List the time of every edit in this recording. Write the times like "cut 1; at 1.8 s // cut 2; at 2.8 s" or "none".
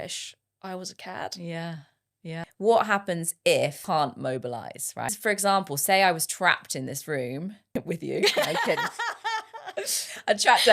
cut 1; at 2.4 s // cut 2; at 3.8 s // cut 3; at 5.1 s // cut 4; at 7.6 s